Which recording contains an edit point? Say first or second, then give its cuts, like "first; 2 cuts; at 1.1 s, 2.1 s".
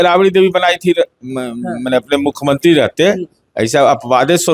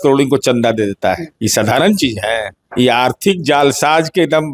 second; 2 cuts; at 1.3 s, 2.6 s